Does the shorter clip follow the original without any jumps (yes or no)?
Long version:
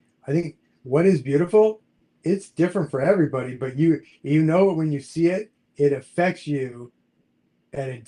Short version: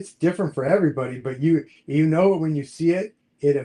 yes